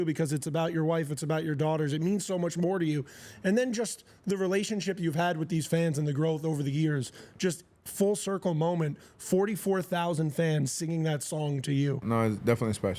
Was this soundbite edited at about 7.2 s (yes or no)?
no